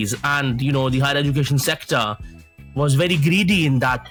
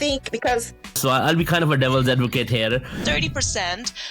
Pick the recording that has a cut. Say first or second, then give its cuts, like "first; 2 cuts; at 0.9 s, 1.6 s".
second; 2 cuts; at 1.0 s, 3.0 s